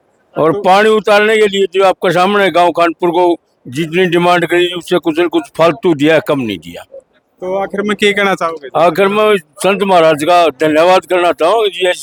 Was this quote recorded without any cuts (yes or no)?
yes